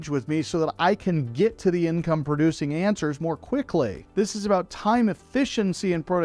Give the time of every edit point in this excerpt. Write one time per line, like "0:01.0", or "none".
0:04.0